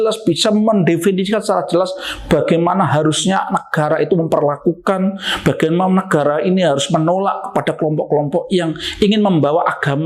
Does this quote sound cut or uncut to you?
uncut